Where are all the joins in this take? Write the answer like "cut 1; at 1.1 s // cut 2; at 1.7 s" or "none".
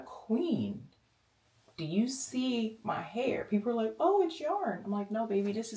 none